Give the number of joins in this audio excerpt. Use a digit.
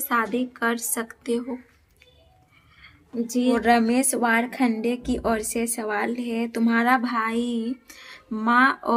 1